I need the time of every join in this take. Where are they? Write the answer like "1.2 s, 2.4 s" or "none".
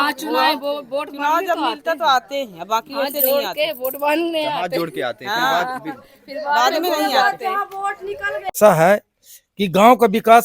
8.5 s